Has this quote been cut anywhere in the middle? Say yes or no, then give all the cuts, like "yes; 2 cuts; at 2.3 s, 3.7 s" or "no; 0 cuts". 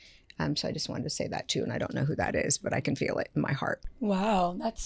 no; 0 cuts